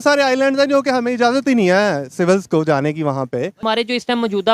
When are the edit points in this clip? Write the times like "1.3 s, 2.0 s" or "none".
3.6 s